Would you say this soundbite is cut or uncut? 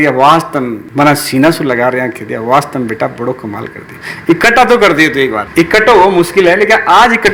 uncut